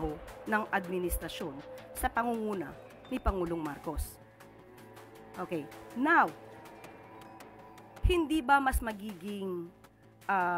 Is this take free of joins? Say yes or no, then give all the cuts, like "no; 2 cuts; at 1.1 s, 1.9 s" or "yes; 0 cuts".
yes; 0 cuts